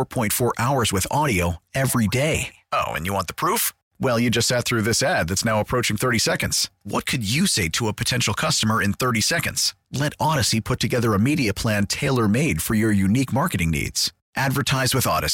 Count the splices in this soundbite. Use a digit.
0